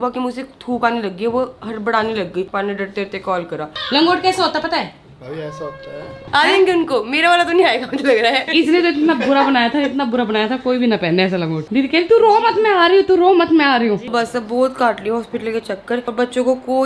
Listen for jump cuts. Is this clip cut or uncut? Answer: cut